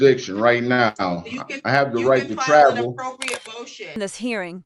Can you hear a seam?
no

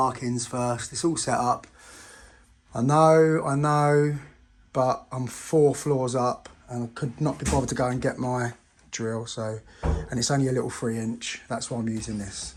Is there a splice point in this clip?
no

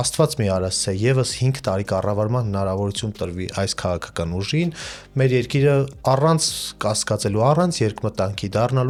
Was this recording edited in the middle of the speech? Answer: no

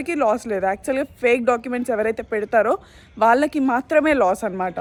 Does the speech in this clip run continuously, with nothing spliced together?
yes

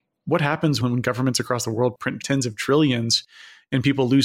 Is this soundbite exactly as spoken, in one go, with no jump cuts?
no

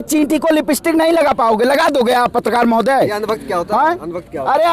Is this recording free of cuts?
yes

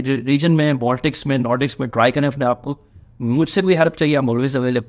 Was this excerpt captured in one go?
yes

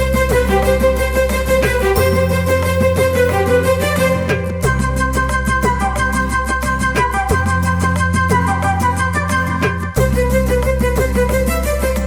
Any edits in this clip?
no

